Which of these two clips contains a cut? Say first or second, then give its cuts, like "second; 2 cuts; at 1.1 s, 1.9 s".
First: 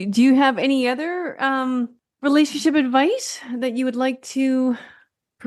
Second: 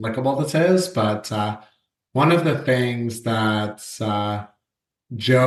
first; 1 cut; at 2.0 s